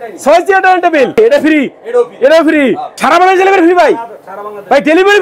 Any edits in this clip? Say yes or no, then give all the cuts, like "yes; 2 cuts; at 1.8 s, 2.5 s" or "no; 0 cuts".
yes; 2 cuts; at 1.1 s, 2.9 s